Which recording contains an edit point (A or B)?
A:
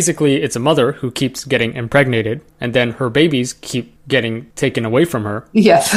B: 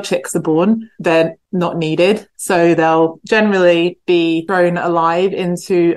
B